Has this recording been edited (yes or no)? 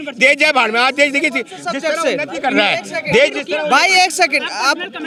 no